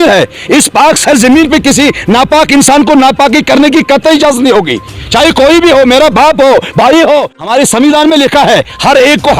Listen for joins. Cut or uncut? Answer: cut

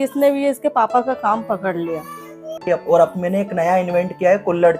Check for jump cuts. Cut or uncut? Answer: cut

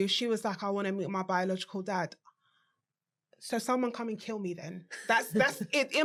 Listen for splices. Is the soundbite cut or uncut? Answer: uncut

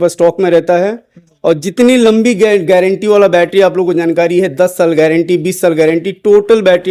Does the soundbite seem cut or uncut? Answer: uncut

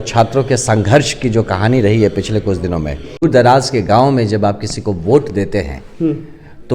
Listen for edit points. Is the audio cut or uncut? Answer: cut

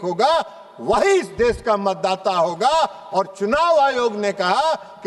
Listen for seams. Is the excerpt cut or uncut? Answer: uncut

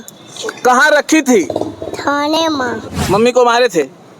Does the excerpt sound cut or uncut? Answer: cut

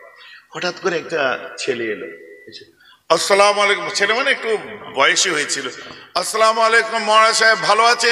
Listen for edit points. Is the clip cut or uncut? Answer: uncut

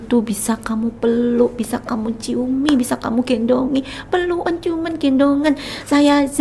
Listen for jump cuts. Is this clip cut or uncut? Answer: uncut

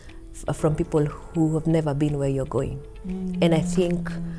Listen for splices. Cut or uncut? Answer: uncut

